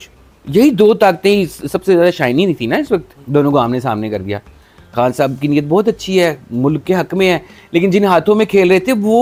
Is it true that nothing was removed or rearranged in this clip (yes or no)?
yes